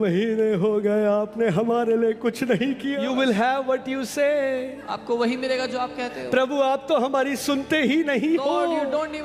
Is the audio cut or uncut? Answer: cut